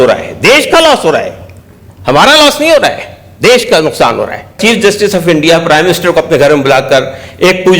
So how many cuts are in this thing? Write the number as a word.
one